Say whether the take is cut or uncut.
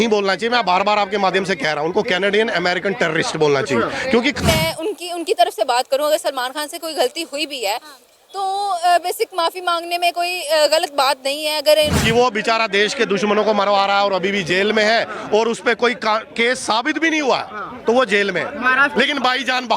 cut